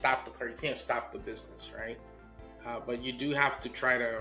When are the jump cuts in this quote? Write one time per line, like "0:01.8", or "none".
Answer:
none